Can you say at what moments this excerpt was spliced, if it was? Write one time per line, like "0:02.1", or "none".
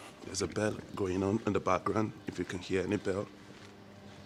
none